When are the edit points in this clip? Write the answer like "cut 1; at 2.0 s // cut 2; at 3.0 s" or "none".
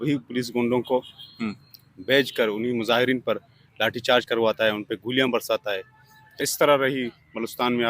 cut 1; at 6.4 s